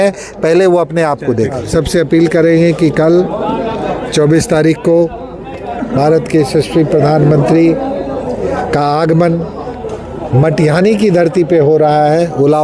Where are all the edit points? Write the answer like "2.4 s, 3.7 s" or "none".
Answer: 1.7 s